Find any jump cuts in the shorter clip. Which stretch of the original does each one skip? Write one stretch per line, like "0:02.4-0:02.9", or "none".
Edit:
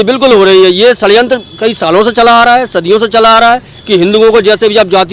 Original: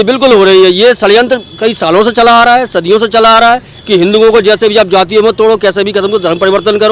none